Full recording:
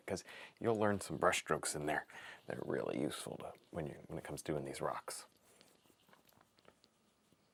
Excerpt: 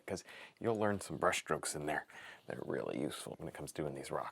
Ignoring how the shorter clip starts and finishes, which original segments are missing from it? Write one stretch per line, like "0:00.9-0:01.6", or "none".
0:03.3-0:04.0